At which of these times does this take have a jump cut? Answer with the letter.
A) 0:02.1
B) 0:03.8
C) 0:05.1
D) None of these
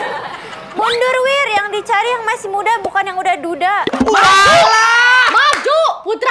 D